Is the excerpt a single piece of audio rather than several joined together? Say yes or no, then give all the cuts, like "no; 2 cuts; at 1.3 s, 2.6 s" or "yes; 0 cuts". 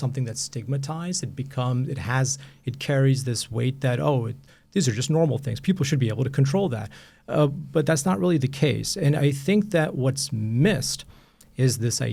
yes; 0 cuts